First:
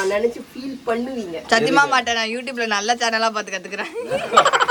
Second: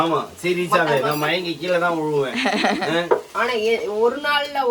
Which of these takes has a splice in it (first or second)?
second